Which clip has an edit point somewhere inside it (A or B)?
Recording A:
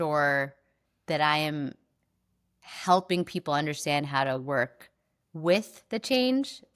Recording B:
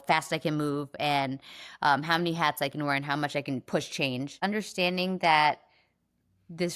B